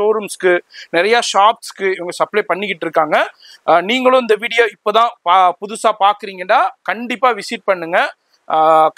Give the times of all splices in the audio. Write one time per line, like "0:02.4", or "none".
none